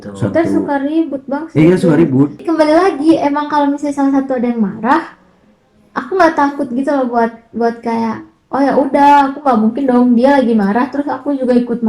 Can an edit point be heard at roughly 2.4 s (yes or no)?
yes